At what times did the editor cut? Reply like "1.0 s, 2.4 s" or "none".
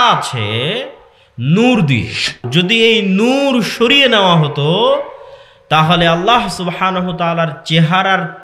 2.4 s